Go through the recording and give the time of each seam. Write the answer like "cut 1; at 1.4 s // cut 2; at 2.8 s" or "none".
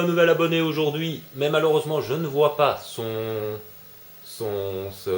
cut 1; at 3.6 s